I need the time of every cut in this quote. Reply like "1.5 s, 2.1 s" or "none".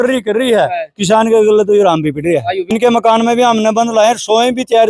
2.7 s